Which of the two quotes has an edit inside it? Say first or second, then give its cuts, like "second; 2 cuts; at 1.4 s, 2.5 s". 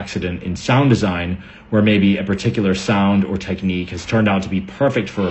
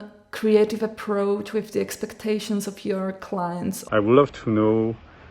second; 1 cut; at 3.8 s